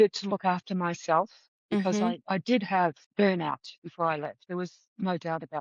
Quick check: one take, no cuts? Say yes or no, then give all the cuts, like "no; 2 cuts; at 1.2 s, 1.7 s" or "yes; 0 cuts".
yes; 0 cuts